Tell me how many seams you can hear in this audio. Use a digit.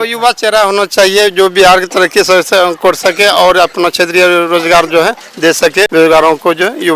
1